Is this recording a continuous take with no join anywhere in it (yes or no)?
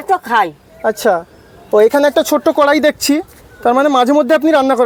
yes